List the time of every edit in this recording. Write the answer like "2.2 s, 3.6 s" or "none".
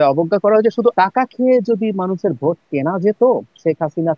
0.9 s